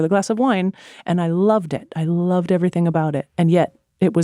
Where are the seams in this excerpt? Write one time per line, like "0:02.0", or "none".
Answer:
0:03.2